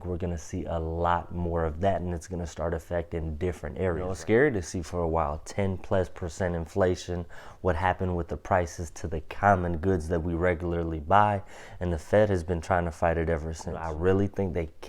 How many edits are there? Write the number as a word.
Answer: two